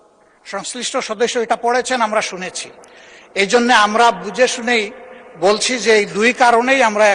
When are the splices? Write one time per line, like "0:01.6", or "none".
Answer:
none